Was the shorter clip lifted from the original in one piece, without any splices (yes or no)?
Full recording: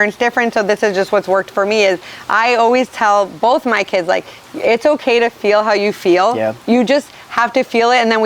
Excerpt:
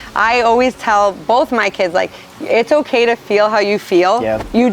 yes